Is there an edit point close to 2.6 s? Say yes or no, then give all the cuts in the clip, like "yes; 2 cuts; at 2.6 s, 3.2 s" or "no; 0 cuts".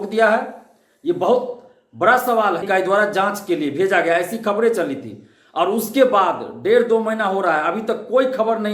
yes; 1 cut; at 2.6 s